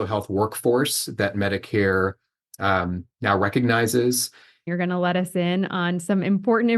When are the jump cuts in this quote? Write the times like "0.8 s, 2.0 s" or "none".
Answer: 4.7 s